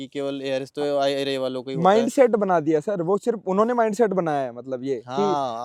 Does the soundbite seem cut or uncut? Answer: uncut